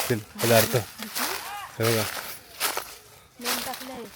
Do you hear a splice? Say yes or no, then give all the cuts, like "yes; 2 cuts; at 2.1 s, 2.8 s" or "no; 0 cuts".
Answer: no; 0 cuts